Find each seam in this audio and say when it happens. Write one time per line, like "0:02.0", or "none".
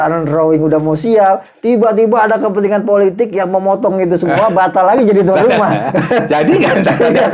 none